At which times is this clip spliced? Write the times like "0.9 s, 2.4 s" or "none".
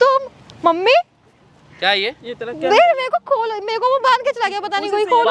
none